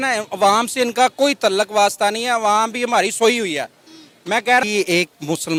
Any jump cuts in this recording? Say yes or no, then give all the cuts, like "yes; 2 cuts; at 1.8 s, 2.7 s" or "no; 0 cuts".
no; 0 cuts